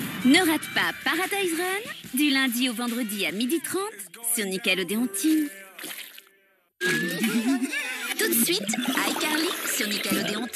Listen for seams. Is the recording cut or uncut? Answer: cut